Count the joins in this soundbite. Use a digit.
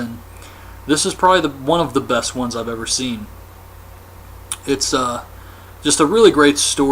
1